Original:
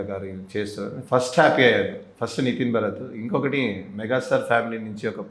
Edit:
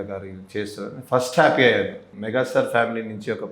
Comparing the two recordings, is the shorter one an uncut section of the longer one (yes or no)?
no